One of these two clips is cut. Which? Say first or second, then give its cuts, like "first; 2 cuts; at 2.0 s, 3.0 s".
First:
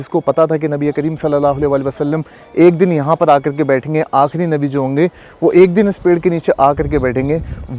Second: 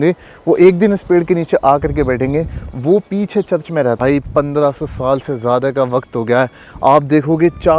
second; 1 cut; at 4.0 s